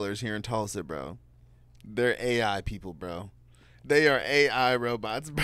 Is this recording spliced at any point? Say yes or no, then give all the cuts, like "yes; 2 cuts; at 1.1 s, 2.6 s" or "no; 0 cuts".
no; 0 cuts